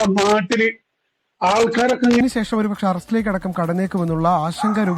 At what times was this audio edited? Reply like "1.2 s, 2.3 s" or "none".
2.2 s

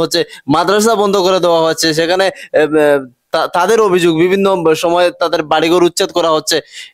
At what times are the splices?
none

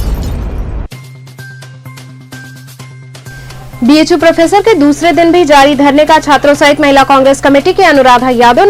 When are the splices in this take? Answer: none

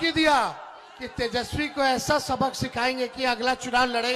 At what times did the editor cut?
none

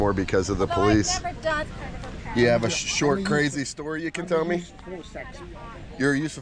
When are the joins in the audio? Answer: 1.6 s

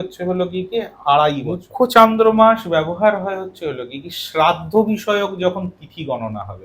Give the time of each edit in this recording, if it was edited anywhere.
1.6 s

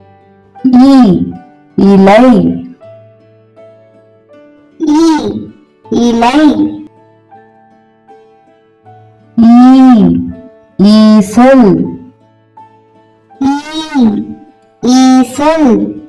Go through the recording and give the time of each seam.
none

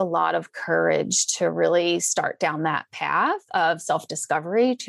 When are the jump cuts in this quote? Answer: none

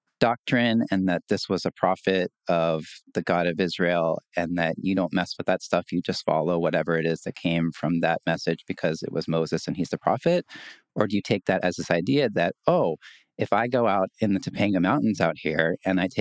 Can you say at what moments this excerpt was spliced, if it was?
none

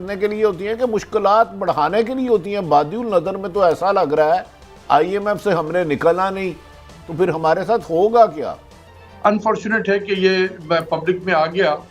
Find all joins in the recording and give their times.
8.6 s

